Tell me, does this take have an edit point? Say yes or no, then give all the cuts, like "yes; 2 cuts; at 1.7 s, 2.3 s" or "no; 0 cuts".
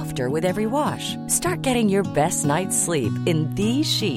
no; 0 cuts